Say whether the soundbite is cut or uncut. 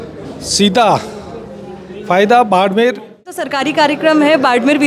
cut